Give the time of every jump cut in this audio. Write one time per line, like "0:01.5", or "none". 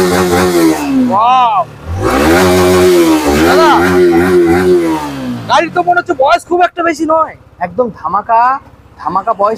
none